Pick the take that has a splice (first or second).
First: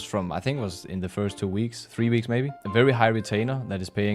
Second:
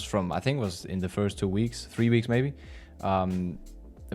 first